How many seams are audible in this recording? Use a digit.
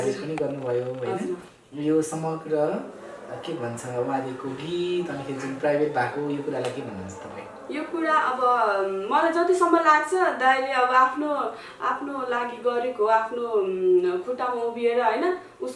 0